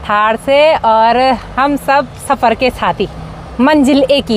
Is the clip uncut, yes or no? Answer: yes